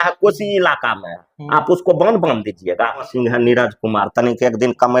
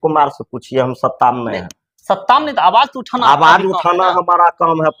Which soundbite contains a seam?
first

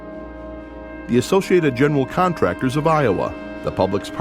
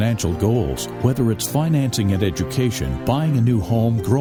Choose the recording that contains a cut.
first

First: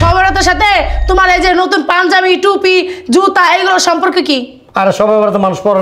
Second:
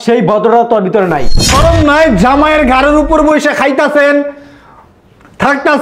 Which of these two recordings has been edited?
second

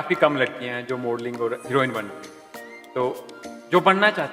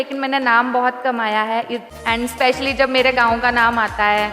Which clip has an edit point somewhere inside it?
second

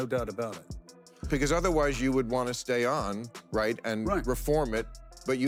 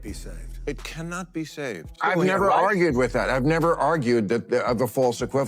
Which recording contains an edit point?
second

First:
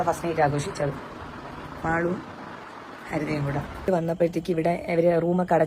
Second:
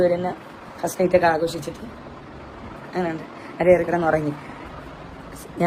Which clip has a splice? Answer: first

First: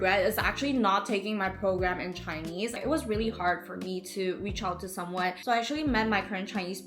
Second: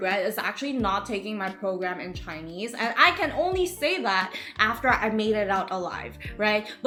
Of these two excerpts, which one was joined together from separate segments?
first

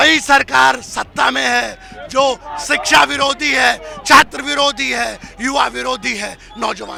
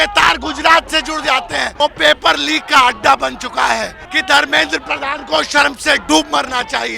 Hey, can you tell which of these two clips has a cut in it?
second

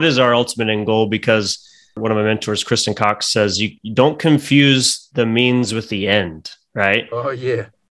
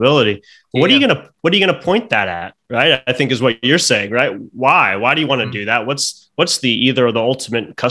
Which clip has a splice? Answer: first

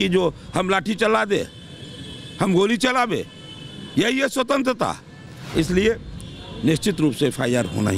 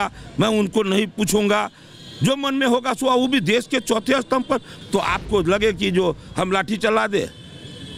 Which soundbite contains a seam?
second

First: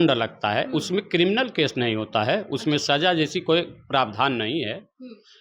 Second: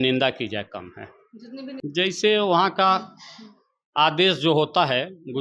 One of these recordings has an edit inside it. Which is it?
second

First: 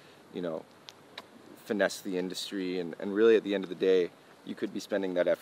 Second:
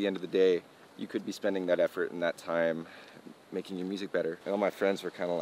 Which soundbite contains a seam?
second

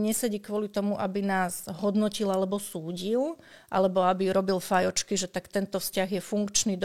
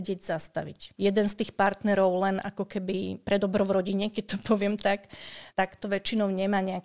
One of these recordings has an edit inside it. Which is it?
second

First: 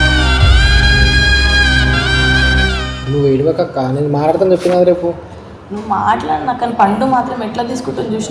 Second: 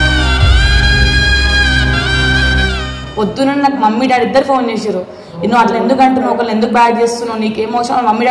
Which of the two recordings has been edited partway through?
second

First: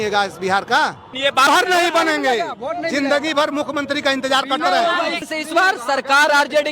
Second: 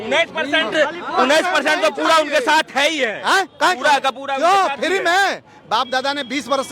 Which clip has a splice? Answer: first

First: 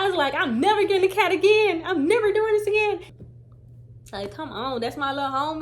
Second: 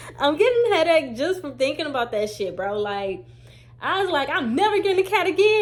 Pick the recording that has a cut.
first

